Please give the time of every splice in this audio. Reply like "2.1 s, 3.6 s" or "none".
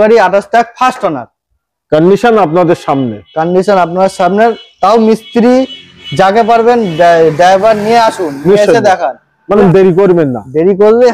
9.6 s